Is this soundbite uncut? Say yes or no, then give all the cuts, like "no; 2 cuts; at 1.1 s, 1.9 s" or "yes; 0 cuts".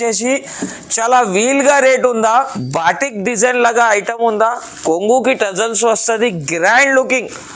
no; 1 cut; at 2.6 s